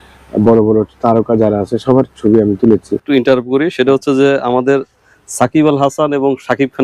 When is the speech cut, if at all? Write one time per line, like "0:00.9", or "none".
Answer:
0:03.0